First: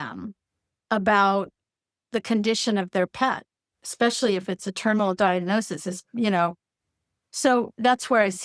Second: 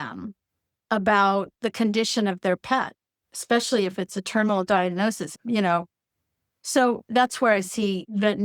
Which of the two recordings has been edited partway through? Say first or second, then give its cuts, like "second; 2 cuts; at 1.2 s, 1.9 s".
second; 2 cuts; at 1.5 s, 5.3 s